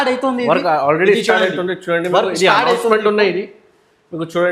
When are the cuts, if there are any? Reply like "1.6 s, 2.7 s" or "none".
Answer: none